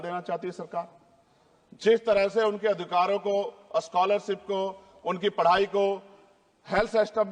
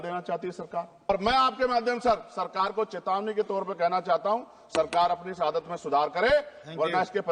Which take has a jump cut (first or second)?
second